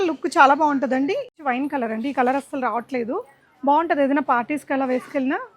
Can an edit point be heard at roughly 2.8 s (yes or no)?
no